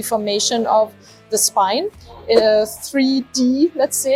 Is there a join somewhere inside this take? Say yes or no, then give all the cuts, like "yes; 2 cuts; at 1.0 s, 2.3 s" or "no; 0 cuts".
no; 0 cuts